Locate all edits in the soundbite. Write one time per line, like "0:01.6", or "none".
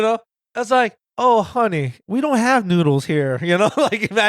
0:01.9